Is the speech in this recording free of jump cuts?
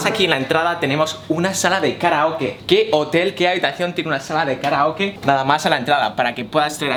yes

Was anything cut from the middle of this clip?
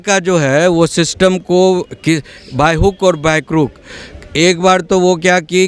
no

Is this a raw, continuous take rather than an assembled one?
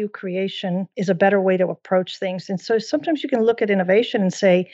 no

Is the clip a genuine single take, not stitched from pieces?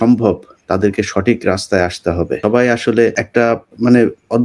no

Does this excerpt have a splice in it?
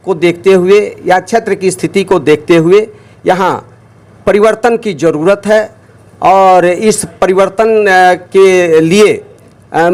no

